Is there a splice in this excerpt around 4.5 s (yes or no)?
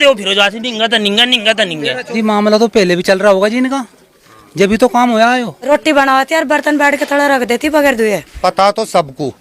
no